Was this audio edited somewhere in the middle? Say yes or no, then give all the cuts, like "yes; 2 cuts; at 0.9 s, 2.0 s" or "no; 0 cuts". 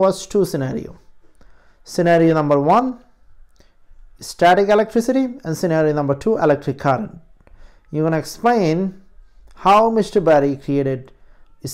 no; 0 cuts